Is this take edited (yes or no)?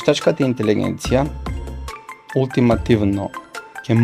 no